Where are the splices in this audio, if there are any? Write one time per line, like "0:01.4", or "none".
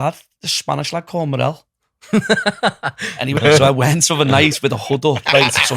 0:03.4